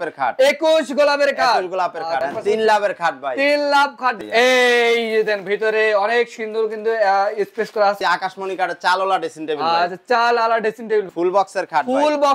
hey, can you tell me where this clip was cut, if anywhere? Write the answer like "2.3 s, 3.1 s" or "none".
2.2 s, 4.2 s, 8.0 s, 11.1 s